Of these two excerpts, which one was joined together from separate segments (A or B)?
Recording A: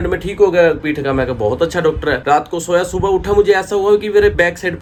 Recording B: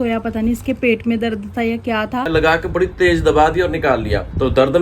B